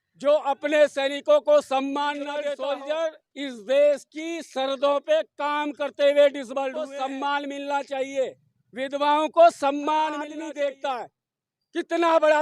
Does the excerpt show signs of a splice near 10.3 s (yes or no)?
yes